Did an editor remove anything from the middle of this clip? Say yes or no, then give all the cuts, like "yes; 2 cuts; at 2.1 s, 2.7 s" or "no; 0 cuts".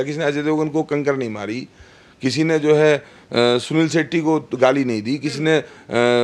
no; 0 cuts